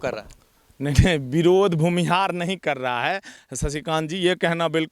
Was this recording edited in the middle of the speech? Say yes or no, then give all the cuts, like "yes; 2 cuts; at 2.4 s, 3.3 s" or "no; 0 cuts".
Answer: no; 0 cuts